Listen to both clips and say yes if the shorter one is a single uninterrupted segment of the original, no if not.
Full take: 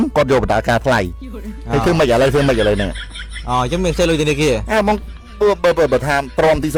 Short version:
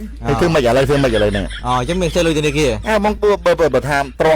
no